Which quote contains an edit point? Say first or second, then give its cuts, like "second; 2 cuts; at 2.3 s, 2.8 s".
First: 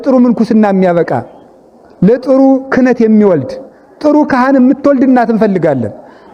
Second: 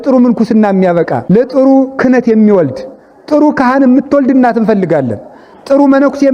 second; 1 cut; at 1.2 s